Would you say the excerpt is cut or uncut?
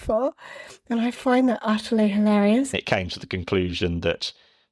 cut